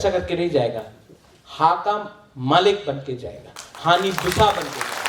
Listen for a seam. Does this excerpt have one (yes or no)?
no